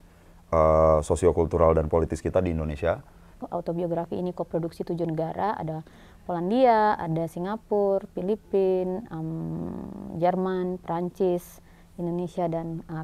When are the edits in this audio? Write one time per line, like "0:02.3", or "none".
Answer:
0:03.4